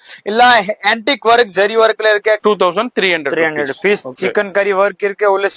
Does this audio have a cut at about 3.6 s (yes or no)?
no